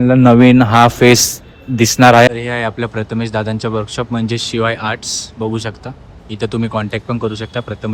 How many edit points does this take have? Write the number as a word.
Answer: zero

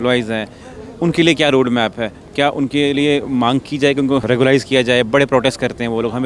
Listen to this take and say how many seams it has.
one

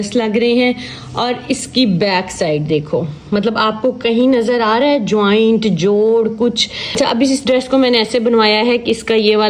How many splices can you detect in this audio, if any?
one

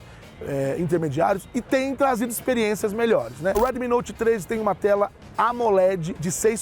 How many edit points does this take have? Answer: one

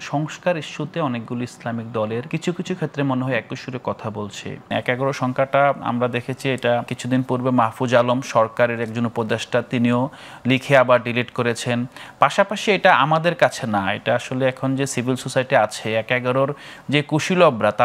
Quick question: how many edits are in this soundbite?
three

